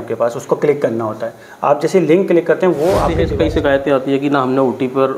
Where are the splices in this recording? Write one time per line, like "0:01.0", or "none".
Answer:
0:03.3